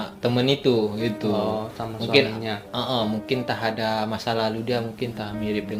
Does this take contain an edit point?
no; 0 cuts

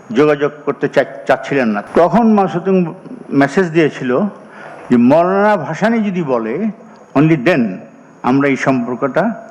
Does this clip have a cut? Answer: yes; 1 cut; at 1.8 s

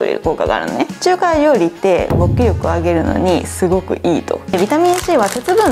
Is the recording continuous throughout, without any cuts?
no; 2 cuts; at 0.9 s, 4.5 s

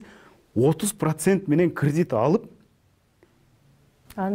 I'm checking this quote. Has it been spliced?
no; 0 cuts

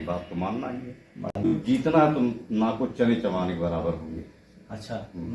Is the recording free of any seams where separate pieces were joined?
no; 1 cut; at 1.5 s

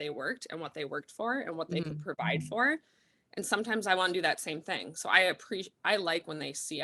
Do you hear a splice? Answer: no; 0 cuts

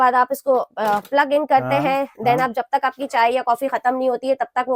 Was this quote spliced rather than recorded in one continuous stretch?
no; 0 cuts

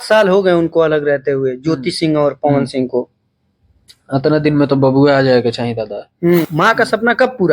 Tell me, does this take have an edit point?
yes; 1 cut; at 6.5 s

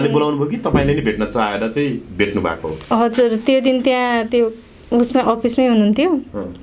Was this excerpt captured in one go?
yes; 0 cuts

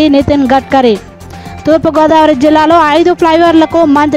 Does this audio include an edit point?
no; 0 cuts

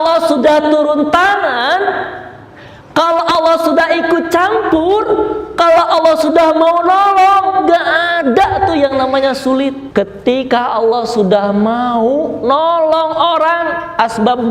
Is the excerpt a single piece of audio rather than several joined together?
no; 1 cut; at 9.8 s

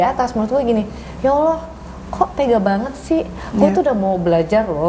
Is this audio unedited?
yes; 0 cuts

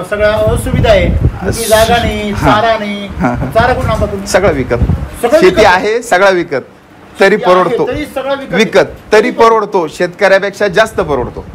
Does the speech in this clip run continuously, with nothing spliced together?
yes; 0 cuts

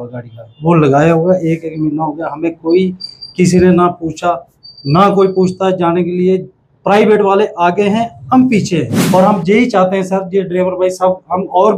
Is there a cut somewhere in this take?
yes; 1 cut; at 9.0 s

